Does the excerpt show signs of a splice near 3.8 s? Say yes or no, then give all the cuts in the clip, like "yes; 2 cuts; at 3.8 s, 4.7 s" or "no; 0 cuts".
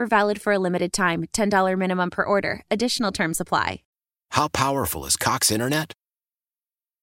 yes; 1 cut; at 3.8 s